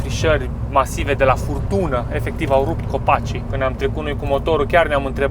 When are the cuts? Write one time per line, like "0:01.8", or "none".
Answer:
0:03.4